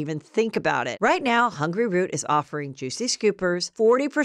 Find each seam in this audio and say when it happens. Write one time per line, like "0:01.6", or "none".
0:00.9